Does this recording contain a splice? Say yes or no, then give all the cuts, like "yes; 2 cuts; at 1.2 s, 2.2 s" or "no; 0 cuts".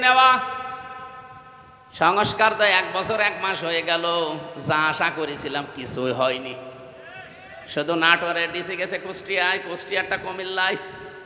no; 0 cuts